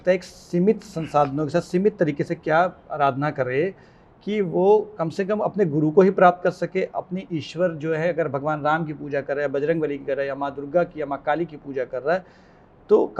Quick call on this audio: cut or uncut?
uncut